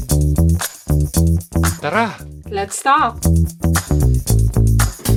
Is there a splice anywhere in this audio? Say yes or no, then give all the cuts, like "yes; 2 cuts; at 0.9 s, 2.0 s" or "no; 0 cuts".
no; 0 cuts